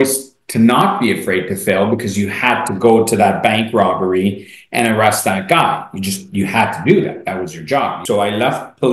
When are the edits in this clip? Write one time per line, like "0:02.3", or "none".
0:08.0

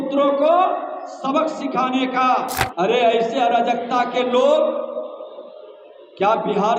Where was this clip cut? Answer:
0:02.7

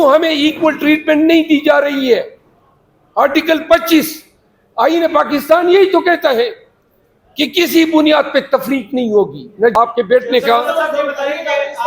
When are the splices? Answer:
0:09.7

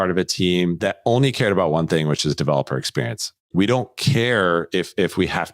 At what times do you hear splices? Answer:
0:00.8
0:03.5

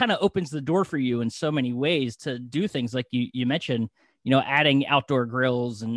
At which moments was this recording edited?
none

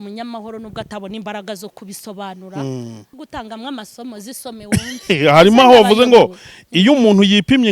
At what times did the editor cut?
0:03.1

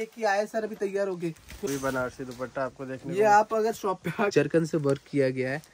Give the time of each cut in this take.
0:01.6
0:04.3

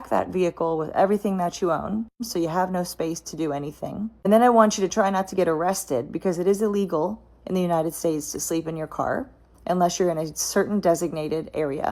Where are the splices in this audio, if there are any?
none

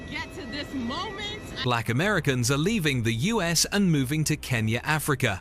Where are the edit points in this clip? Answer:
0:01.6

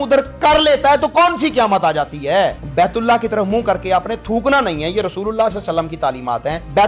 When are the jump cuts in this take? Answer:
0:02.5

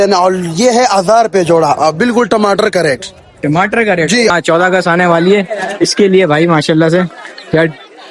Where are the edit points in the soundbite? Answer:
0:04.3

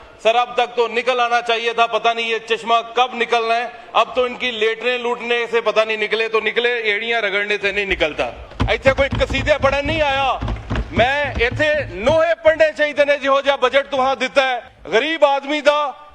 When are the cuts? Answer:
0:08.4
0:14.7

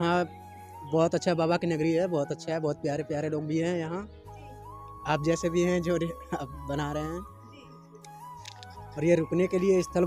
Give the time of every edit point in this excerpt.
none

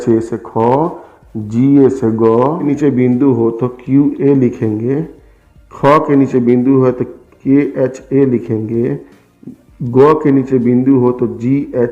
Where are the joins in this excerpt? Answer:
0:02.7

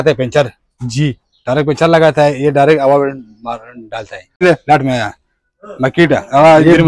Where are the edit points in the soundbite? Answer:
0:04.4

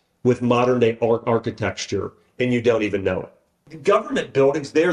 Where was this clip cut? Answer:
0:03.6

